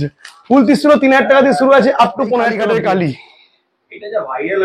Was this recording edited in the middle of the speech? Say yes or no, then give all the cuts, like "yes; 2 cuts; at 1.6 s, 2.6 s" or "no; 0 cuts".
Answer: yes; 1 cut; at 2.5 s